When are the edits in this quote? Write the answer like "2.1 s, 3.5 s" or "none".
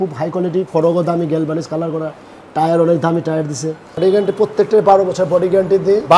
3.9 s